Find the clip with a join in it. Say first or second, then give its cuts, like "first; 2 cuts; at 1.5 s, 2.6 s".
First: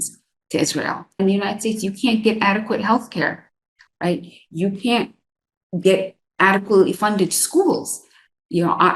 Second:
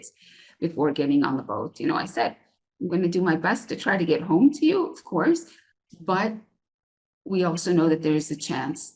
first; 1 cut; at 1.2 s